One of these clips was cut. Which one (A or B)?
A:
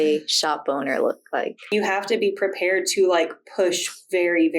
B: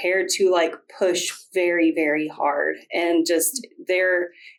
A